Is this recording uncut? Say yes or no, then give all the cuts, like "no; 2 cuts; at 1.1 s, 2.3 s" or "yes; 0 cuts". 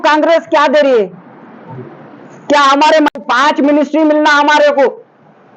no; 1 cut; at 3.1 s